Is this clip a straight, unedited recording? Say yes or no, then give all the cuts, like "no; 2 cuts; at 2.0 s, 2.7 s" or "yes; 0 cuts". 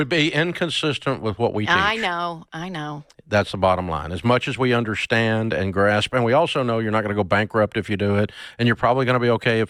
yes; 0 cuts